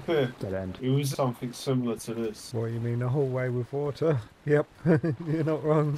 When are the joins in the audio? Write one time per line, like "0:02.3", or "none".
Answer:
0:01.1